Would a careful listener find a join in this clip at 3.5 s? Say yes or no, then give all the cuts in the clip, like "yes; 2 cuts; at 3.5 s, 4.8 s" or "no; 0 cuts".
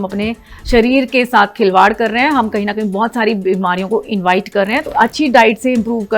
no; 1 cut; at 4.9 s